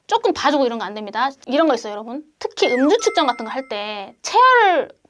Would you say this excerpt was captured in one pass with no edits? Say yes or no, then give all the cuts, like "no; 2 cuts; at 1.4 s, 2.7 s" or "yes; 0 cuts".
no; 1 cut; at 1.4 s